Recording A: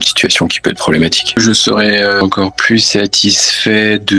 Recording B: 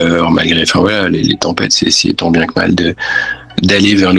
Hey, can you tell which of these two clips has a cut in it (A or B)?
A